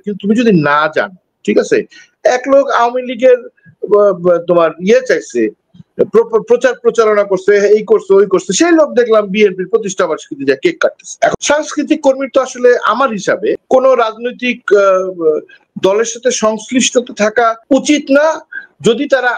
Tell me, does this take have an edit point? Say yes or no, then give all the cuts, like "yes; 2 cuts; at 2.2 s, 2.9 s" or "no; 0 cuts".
yes; 1 cut; at 11.3 s